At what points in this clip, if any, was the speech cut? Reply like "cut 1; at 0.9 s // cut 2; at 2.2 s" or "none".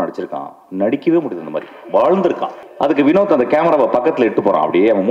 cut 1; at 2.6 s

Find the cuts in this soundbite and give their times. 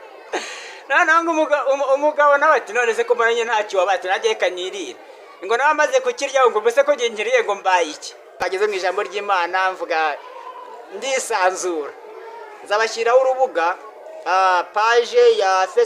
cut 1; at 8.4 s

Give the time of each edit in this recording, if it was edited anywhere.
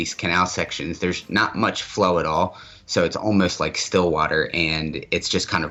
none

